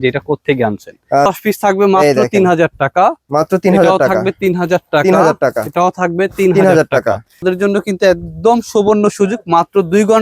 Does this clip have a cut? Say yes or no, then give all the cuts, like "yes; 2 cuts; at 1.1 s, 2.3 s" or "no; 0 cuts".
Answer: yes; 2 cuts; at 1.3 s, 7.4 s